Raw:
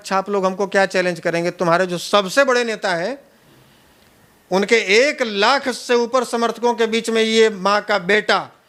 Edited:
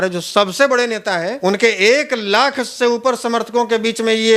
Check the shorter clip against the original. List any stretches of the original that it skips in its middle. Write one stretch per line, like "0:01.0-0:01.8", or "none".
0:03.1-0:04.4